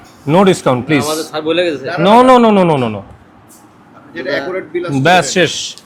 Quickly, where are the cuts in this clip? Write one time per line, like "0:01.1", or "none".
none